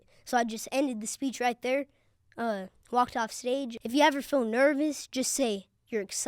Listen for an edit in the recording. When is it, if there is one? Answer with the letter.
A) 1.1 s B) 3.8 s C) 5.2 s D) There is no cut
B